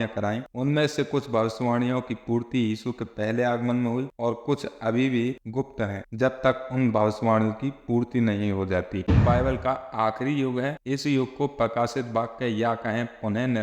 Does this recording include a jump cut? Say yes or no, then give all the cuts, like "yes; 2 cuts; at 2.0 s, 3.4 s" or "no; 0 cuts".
yes; 1 cut; at 9.1 s